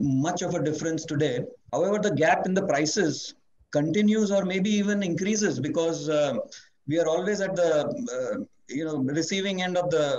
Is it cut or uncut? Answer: cut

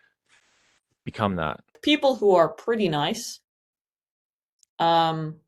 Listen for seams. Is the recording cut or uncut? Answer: cut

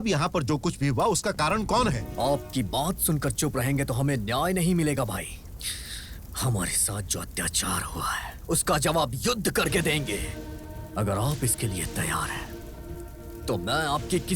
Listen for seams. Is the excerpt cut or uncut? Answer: cut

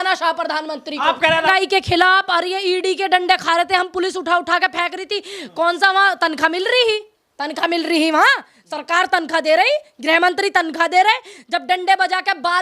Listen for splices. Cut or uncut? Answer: cut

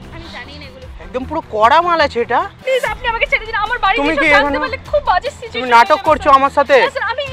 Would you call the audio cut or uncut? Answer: cut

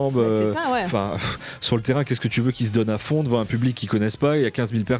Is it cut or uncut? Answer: uncut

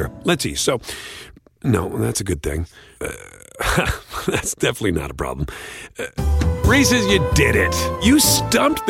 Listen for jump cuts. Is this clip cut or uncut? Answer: uncut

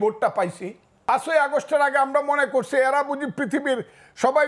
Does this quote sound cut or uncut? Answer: cut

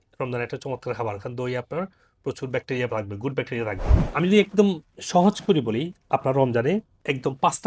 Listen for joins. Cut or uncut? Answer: cut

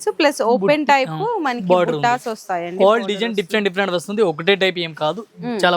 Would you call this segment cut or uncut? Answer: uncut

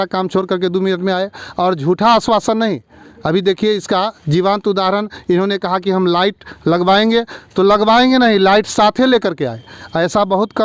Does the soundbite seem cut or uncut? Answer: uncut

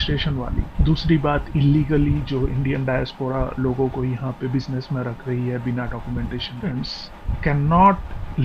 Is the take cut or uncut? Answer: cut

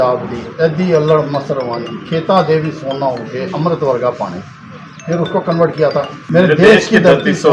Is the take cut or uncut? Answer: cut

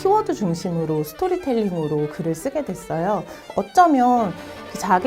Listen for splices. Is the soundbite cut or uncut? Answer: cut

